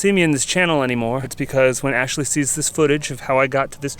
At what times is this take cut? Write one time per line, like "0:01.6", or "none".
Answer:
0:01.3